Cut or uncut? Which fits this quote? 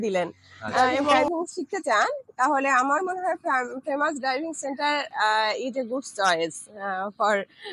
cut